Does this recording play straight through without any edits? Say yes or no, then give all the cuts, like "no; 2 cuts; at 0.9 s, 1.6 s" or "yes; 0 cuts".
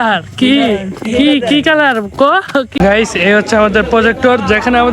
no; 1 cut; at 2.7 s